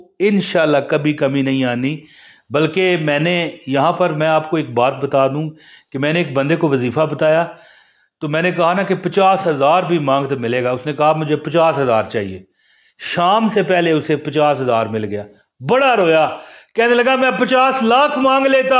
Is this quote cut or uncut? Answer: uncut